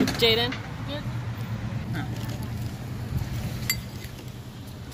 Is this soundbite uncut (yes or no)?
no